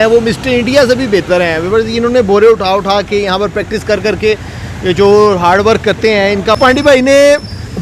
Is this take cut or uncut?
cut